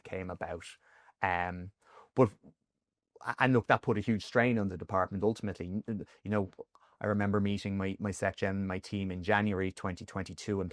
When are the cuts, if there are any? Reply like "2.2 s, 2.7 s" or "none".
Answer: none